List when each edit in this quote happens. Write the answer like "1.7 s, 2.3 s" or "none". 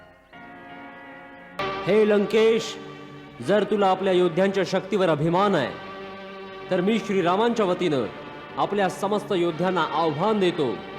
1.6 s